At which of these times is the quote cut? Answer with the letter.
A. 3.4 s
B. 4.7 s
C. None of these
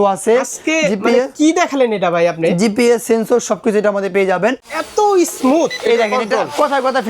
B